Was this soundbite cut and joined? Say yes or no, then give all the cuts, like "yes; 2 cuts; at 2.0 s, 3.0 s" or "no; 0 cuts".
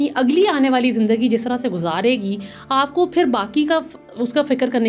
no; 0 cuts